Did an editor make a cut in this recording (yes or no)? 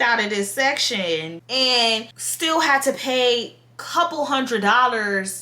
no